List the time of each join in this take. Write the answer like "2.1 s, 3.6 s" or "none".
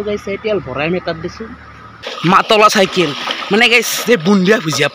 2.1 s

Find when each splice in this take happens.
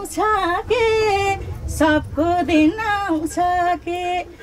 none

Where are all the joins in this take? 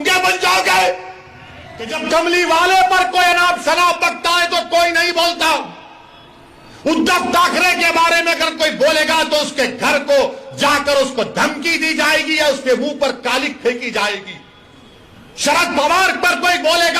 1.9 s

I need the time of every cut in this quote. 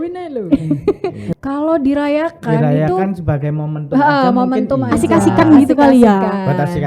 1.2 s

